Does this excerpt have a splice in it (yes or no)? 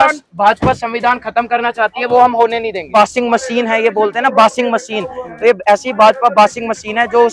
yes